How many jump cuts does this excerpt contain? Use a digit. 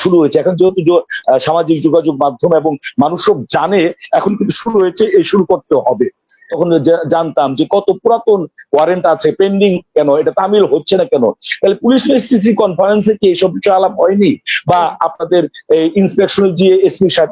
1